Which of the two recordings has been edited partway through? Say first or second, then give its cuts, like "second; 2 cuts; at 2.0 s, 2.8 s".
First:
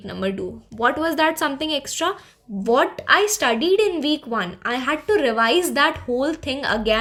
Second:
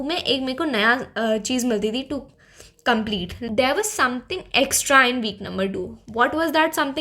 second; 1 cut; at 3.4 s